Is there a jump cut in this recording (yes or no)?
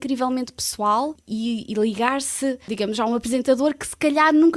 yes